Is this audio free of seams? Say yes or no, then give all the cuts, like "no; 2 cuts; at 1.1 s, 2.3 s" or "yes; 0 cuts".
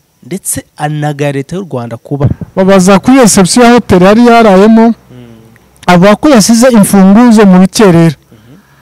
no; 1 cut; at 2.2 s